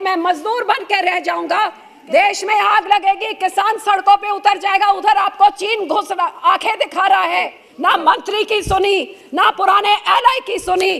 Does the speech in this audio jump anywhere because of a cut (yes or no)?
yes